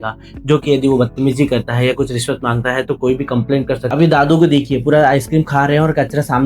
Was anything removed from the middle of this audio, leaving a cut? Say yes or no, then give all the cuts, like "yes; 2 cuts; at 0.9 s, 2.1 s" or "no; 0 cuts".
yes; 1 cut; at 3.9 s